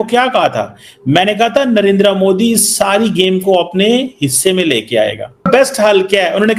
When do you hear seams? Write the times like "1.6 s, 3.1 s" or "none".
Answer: 5.5 s